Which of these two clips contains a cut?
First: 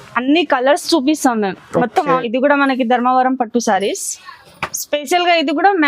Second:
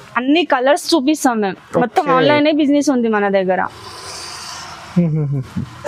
first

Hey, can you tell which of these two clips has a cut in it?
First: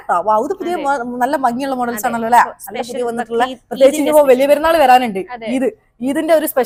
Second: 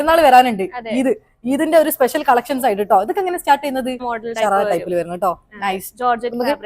second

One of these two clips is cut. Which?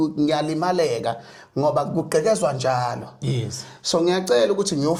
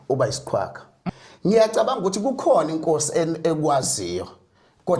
second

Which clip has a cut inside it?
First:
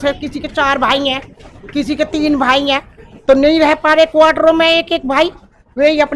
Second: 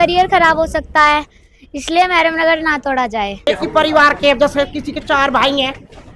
second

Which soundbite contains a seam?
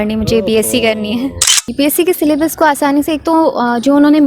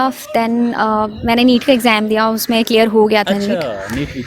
first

